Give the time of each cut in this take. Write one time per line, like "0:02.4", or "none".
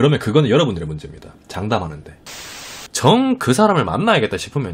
0:02.4